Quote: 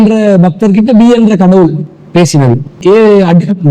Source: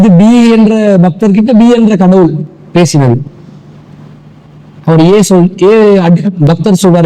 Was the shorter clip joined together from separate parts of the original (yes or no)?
yes